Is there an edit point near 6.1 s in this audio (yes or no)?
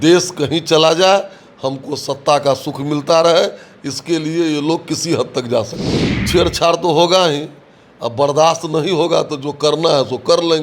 yes